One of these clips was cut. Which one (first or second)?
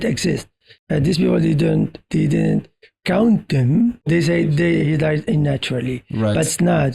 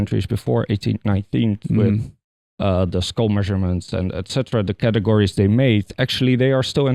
first